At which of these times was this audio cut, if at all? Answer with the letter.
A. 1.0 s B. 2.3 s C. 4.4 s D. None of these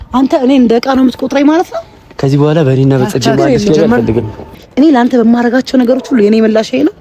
C